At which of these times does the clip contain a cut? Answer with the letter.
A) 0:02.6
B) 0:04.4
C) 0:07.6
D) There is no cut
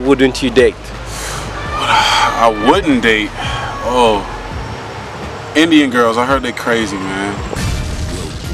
C